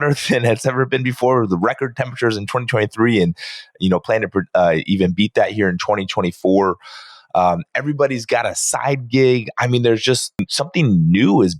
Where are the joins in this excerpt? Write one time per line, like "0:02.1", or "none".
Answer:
0:10.5